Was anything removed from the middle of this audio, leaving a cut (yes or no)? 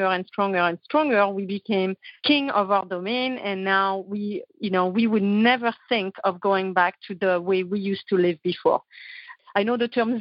yes